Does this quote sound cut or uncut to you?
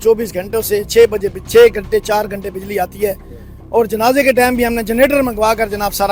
uncut